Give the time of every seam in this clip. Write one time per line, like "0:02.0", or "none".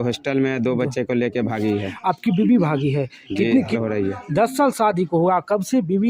0:03.8